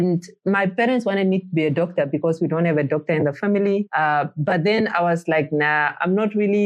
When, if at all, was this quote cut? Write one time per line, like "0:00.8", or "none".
none